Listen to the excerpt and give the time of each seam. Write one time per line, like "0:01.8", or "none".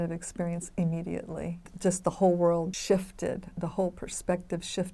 0:01.6
0:02.8